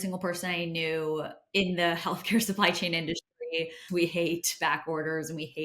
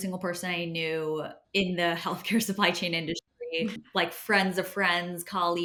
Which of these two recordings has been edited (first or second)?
first